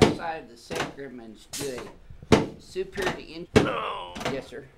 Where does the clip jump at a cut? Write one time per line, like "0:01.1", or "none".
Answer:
0:03.4